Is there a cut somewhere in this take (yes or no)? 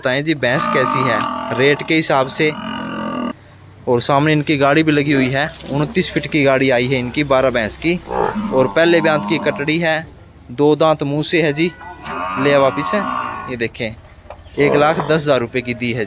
yes